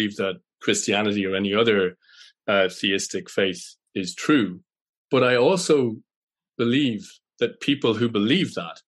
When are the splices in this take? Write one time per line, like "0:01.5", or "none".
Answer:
none